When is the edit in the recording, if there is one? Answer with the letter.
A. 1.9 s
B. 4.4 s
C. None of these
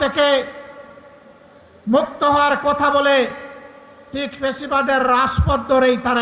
C